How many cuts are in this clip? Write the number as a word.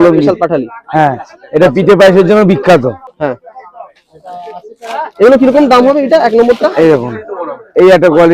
one